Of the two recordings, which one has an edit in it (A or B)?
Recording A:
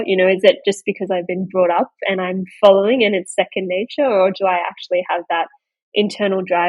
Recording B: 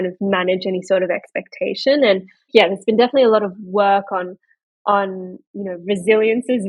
B